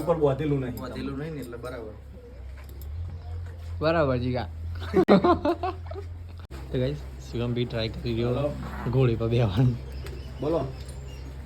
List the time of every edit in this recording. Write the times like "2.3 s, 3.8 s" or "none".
6.5 s